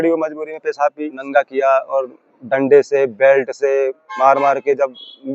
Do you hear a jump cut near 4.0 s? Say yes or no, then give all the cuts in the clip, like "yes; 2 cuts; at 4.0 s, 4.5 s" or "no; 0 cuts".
no; 1 cut; at 1.1 s